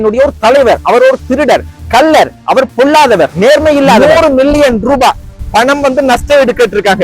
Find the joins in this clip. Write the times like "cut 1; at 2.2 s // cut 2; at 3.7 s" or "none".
cut 1; at 4.0 s